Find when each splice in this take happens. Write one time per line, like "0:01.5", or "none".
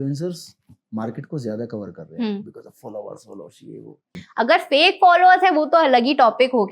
0:04.1